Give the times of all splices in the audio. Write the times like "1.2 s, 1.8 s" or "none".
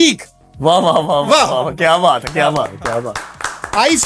none